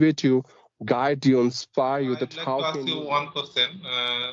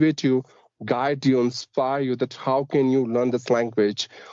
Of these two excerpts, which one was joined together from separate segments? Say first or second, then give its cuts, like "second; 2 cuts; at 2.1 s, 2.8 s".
first; 1 cut; at 2.7 s